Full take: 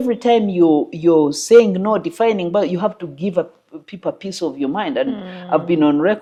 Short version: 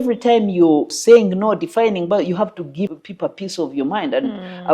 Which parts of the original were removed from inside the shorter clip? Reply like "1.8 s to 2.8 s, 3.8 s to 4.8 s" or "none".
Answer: 0.9 s to 1.4 s, 3.3 s to 3.7 s